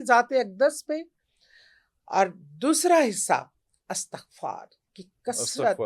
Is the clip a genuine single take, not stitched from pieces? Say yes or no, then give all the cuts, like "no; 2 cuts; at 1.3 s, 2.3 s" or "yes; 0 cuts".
yes; 0 cuts